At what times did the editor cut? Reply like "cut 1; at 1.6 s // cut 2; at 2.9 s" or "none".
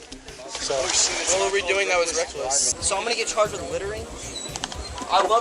cut 1; at 2.7 s